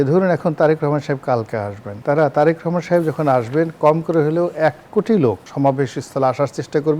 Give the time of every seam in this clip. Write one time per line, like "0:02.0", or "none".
0:01.9
0:05.1